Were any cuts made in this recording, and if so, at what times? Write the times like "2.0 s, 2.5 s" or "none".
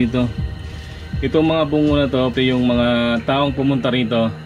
2.3 s